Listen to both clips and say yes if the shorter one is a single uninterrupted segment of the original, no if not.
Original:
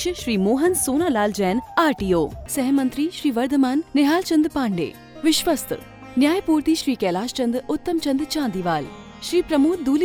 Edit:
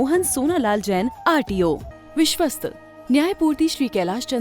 no